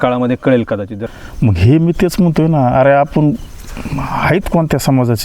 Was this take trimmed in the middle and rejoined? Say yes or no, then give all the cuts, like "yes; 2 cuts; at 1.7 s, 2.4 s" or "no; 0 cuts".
yes; 1 cut; at 1.0 s